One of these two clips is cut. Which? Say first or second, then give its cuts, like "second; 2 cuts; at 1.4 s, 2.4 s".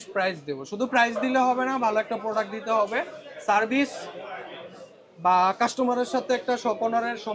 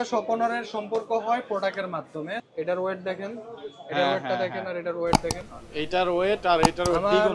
second; 1 cut; at 2.4 s